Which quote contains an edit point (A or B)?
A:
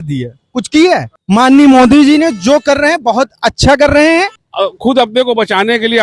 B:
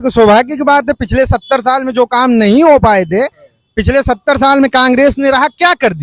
A